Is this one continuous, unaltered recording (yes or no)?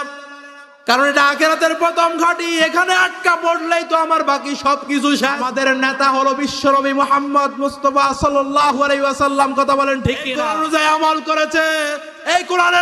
no